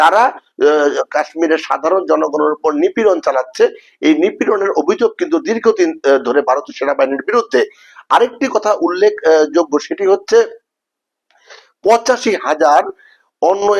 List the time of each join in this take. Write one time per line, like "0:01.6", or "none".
none

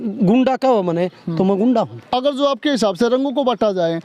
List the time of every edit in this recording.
0:02.0

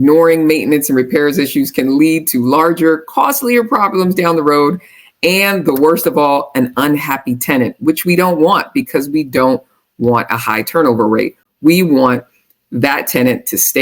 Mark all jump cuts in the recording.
none

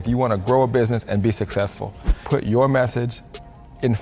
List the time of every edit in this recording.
0:02.2

